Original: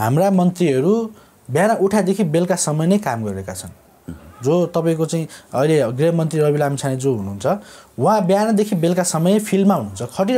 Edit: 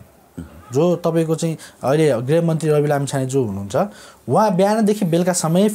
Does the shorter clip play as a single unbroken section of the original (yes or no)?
yes